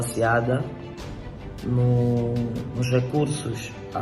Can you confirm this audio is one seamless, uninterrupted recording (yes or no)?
yes